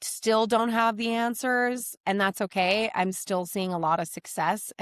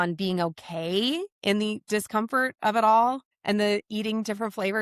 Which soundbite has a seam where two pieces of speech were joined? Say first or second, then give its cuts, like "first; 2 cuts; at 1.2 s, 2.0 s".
second; 1 cut; at 3.3 s